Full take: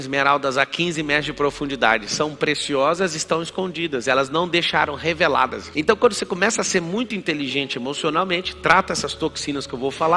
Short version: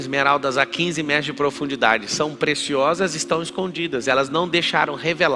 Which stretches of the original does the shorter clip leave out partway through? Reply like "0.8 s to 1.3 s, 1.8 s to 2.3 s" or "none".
none